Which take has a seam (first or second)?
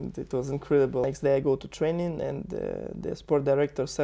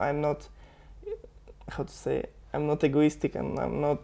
first